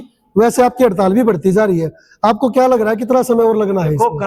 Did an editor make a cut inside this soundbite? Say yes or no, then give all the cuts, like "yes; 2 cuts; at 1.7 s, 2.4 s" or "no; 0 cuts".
no; 0 cuts